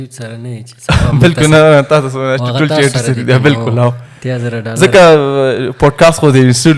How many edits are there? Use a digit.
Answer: 0